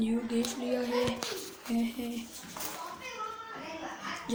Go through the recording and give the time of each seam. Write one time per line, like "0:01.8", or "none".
none